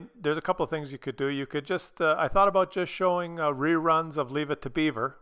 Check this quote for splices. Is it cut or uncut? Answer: uncut